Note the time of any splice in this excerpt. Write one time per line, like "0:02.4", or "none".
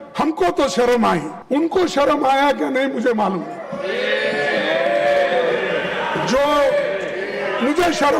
0:01.3